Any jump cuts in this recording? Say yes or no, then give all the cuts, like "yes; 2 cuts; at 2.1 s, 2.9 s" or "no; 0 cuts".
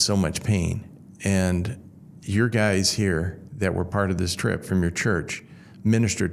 no; 0 cuts